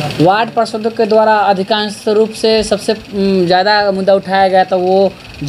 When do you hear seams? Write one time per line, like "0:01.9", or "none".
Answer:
none

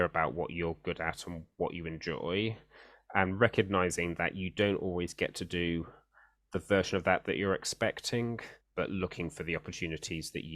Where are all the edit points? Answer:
none

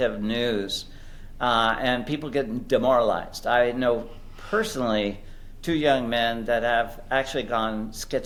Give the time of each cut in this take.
none

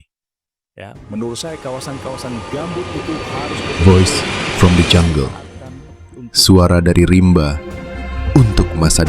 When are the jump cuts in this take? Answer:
0:03.7

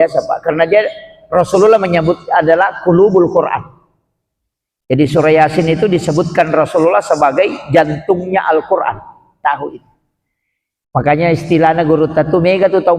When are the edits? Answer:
0:09.4

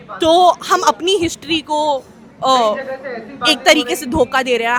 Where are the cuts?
none

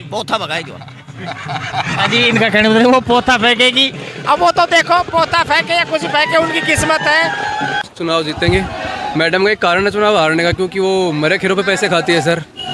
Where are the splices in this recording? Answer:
0:07.8

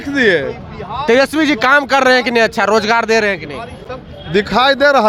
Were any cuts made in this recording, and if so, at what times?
none

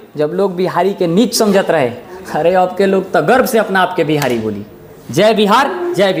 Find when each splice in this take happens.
none

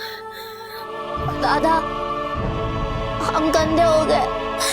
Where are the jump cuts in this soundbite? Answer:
0:01.0

